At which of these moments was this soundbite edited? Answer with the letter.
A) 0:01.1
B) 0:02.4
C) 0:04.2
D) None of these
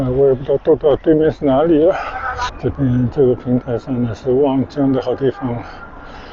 B